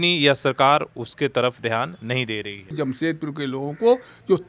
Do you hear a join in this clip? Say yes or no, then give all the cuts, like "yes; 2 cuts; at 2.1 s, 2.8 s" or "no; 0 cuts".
yes; 1 cut; at 2.7 s